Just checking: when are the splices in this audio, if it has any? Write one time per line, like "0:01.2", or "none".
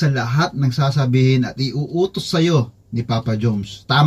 none